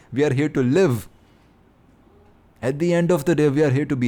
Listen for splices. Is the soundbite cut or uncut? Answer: uncut